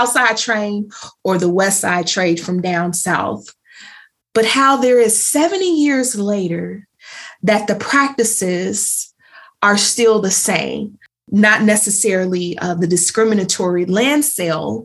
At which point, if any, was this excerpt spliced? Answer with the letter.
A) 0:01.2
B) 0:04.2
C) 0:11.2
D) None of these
C